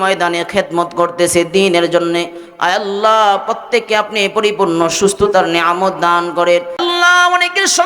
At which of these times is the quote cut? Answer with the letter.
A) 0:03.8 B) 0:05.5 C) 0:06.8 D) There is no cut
C